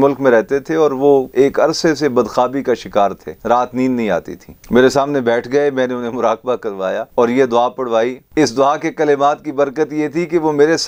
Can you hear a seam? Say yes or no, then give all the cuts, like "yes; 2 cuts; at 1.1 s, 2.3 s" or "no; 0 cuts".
yes; 2 cuts; at 1.3 s, 3.3 s